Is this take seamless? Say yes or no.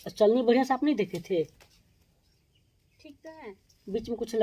yes